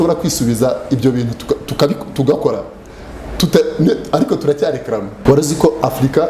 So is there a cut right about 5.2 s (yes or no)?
yes